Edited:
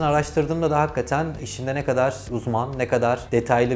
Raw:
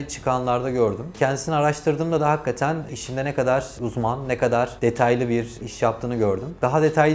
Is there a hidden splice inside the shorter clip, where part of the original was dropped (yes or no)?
no